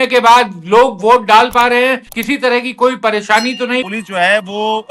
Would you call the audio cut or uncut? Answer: cut